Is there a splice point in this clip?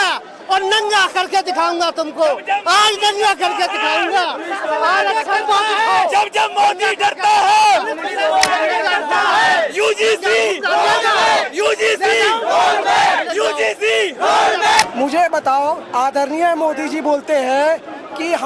yes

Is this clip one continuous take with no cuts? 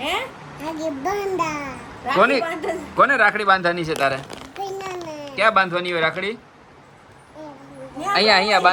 yes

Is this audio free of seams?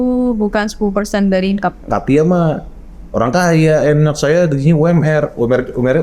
no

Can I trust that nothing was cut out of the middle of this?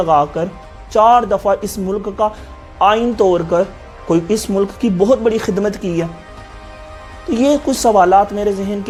yes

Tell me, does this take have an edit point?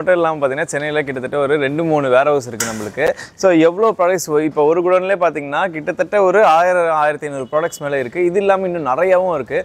no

